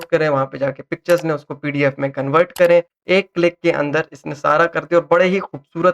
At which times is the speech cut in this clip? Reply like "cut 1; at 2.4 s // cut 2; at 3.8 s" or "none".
cut 1; at 3.0 s